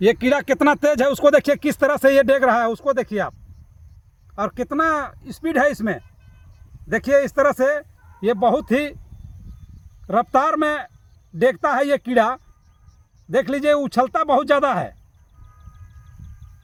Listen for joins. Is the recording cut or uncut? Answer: uncut